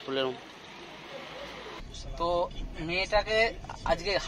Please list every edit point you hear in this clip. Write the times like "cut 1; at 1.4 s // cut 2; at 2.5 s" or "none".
cut 1; at 1.8 s